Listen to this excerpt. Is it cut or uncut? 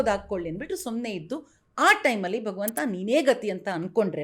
uncut